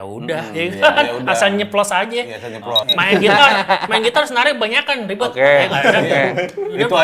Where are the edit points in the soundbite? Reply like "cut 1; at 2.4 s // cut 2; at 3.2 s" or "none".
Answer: cut 1; at 2.9 s